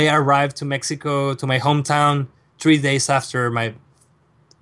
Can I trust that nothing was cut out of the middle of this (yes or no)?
yes